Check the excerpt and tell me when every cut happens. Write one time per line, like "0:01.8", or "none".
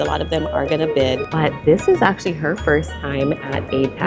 0:01.3